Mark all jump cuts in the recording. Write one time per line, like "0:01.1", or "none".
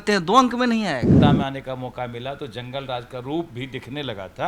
0:01.1